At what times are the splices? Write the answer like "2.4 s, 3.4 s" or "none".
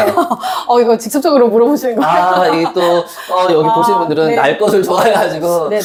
none